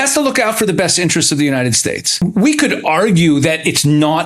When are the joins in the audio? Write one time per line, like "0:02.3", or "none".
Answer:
0:02.2